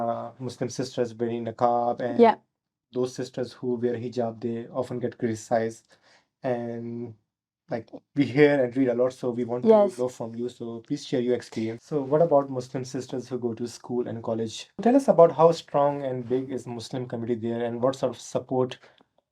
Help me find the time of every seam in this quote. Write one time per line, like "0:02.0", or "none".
0:11.8
0:14.8